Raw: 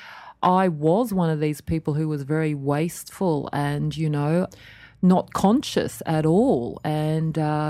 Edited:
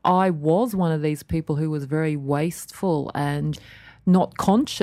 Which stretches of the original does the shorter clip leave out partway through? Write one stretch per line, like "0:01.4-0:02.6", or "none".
0:04.0-0:04.5